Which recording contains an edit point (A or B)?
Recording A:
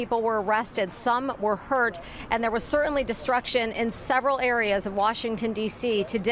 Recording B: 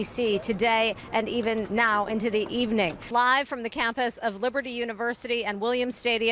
B